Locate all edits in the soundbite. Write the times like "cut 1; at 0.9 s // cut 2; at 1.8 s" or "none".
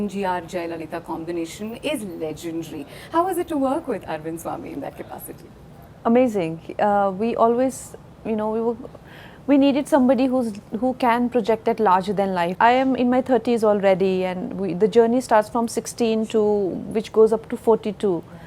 cut 1; at 12.5 s